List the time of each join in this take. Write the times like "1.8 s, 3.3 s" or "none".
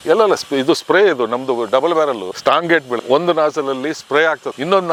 none